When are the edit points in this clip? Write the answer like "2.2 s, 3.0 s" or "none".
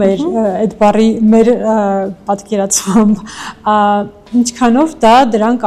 none